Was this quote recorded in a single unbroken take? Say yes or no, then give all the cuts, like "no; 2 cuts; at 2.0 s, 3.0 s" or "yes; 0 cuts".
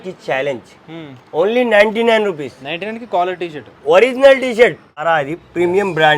no; 1 cut; at 5.0 s